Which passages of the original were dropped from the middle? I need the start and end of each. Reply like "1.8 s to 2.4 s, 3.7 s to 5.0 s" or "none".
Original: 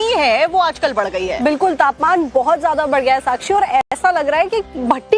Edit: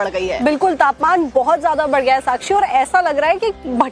3.9 s to 4.0 s